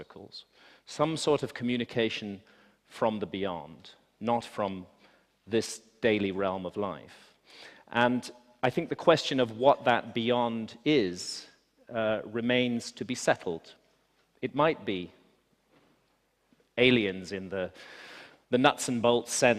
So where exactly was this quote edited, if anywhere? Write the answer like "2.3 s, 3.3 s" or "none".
10.6 s